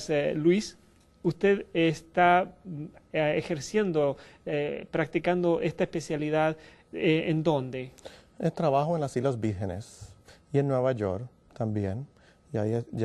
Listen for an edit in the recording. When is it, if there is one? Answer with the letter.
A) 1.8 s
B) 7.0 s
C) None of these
A